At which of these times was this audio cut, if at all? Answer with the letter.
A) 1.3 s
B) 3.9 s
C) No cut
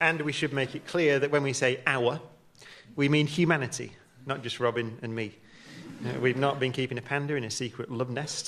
A